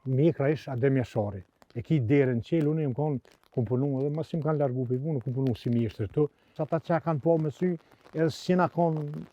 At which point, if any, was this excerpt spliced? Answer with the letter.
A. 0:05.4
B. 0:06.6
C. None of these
B